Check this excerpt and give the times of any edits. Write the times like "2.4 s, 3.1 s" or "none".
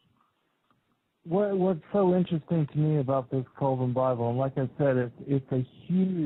none